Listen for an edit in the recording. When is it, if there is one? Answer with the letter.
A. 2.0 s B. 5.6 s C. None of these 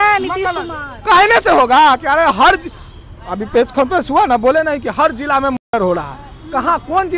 C